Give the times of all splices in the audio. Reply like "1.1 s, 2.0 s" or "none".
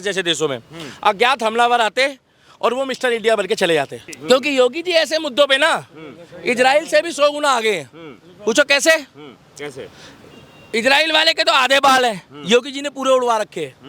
4.1 s